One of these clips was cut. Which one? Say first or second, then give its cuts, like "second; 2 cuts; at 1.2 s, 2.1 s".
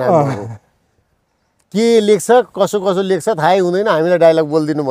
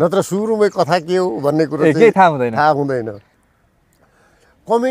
second; 1 cut; at 3.2 s